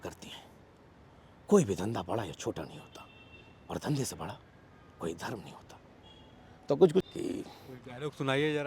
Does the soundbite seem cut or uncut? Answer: cut